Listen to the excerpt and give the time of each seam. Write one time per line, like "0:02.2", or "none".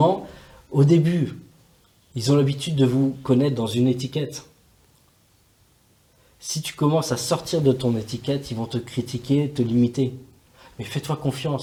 none